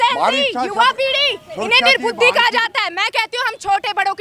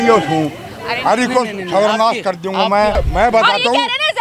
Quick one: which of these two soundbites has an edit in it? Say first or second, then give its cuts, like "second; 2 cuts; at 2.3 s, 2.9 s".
second; 1 cut; at 2.9 s